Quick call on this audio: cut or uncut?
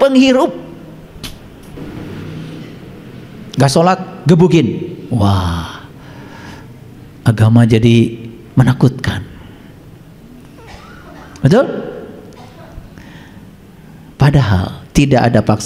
cut